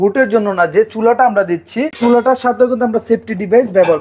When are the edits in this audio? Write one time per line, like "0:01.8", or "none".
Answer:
0:01.9